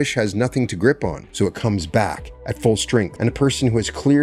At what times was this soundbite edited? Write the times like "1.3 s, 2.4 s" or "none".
1.2 s, 3.1 s

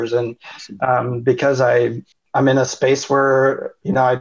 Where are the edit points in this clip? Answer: 2.1 s

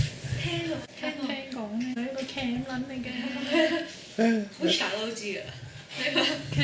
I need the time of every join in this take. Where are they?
none

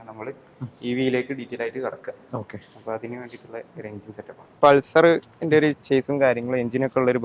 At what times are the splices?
none

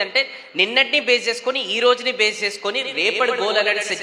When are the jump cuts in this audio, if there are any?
none

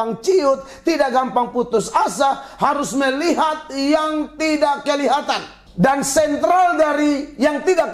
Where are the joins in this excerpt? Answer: 5.6 s

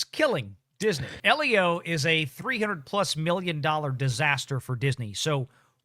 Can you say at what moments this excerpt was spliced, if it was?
1.1 s

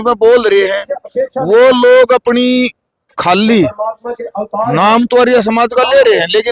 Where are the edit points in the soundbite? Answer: none

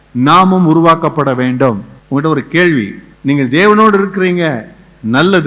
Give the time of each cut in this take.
1.9 s, 3.0 s

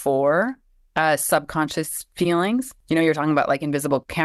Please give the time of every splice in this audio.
2.8 s

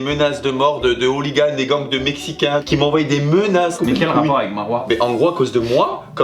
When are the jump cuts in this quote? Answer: none

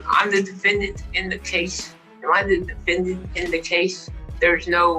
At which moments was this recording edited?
3.9 s

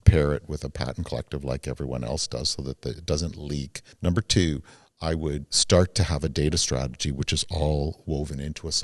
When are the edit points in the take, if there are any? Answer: 3.8 s, 5.5 s

